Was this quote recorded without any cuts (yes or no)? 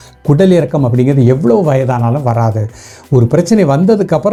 yes